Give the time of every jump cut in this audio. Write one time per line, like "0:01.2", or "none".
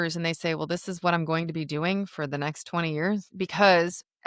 0:03.3